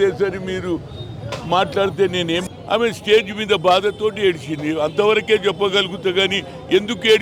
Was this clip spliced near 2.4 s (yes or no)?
yes